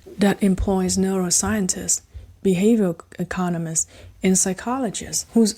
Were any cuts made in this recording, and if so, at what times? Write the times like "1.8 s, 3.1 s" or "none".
none

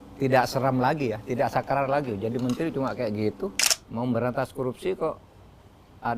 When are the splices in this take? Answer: 3.6 s

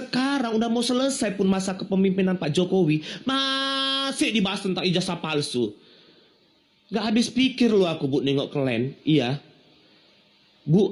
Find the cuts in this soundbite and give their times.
none

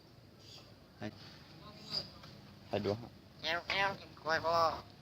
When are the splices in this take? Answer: 1.1 s

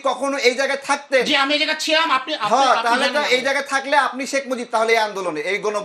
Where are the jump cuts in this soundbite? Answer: none

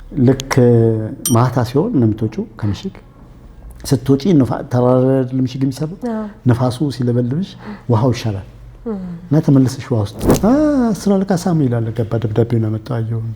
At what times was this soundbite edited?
10.2 s

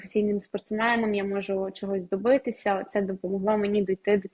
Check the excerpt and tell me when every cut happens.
none

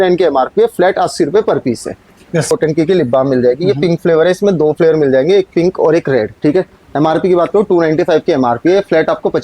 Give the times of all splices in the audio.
2.5 s

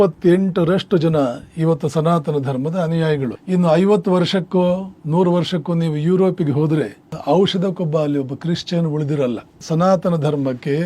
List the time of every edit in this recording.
3.4 s, 4.9 s, 9.6 s

